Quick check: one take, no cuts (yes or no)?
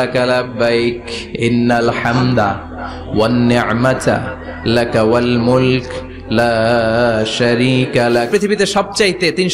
no